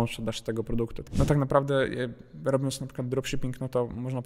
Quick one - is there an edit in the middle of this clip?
yes; 1 cut; at 1.0 s

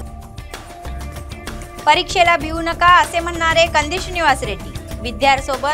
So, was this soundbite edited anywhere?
no; 0 cuts

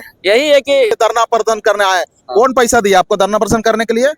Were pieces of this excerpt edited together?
yes; 1 cut; at 1.0 s

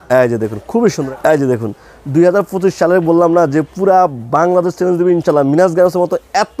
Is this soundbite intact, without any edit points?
no; 1 cut; at 1.0 s

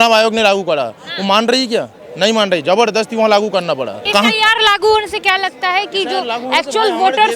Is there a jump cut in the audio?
yes; 1 cut; at 4.0 s

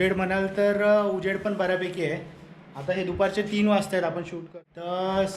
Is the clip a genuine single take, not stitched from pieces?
no; 1 cut; at 4.4 s

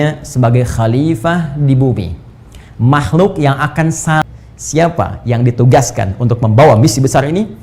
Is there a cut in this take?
yes; 1 cut; at 4.2 s

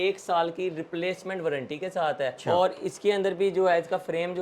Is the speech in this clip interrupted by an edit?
yes; 1 cut; at 2.4 s

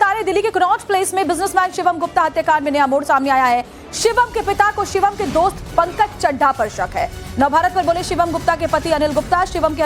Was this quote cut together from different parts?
no; 0 cuts

